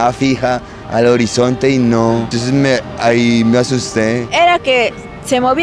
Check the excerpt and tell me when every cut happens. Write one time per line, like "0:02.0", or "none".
0:02.3
0:04.3